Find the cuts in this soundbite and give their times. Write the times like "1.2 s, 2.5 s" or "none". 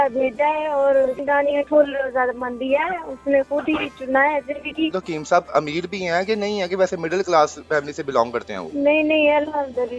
1.2 s, 4.9 s